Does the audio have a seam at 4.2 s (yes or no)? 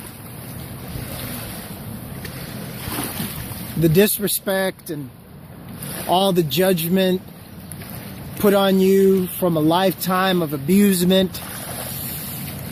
no